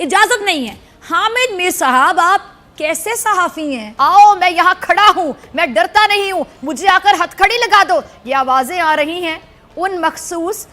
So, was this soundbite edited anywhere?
yes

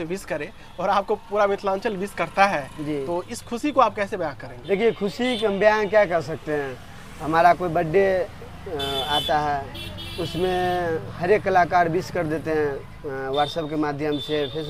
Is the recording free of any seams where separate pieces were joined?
yes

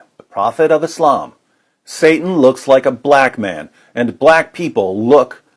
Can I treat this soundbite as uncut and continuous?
yes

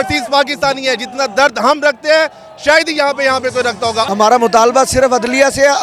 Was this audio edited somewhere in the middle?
yes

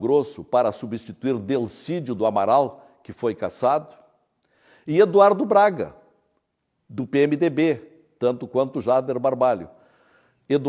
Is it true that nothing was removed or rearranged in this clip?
no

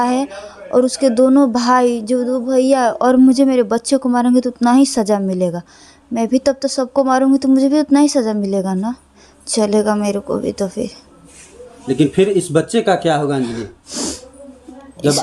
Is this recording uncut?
yes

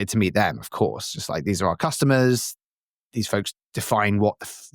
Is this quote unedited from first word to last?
yes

